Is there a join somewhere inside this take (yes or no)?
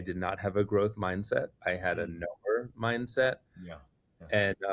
no